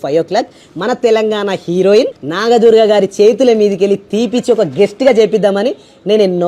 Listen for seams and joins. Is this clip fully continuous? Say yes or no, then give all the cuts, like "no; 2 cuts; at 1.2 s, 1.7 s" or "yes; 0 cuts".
no; 1 cut; at 2.2 s